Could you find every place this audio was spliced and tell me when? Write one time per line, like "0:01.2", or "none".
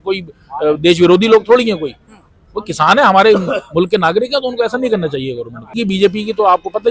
0:05.7